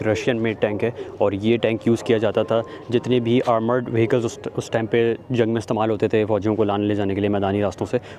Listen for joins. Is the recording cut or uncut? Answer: uncut